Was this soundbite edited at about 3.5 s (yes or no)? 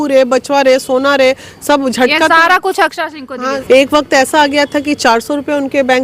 yes